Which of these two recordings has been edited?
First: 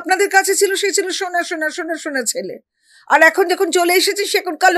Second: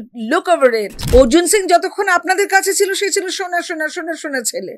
second; 1 cut; at 1.0 s

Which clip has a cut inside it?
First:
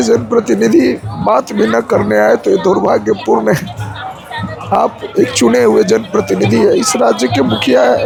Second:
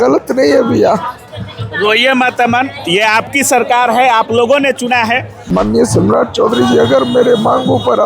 second; 1 cut; at 5.3 s

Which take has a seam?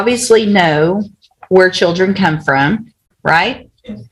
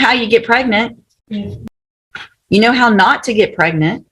second; 1 cut; at 1.6 s

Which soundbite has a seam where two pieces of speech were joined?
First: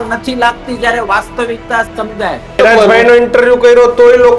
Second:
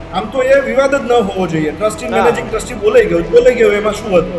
first; 1 cut; at 2.6 s

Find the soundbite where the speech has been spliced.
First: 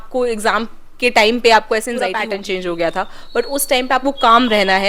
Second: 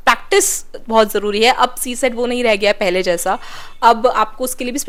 first; 1 cut; at 2.2 s

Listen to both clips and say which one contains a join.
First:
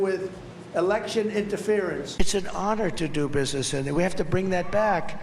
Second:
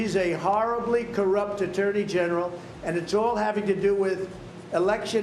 first; 1 cut; at 2.2 s

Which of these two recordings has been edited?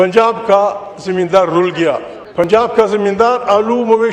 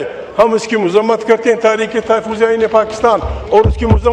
first; 1 cut; at 2.1 s

